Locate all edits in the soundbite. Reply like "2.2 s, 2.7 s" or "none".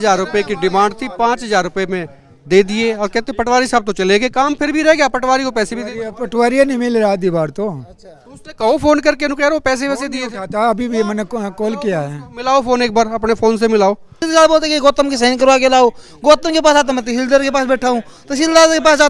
14.1 s

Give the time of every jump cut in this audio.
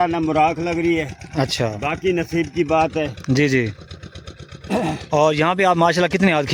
none

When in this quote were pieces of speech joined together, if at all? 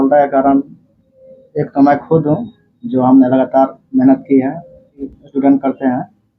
5.1 s

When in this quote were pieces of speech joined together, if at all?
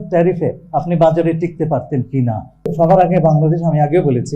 2.5 s

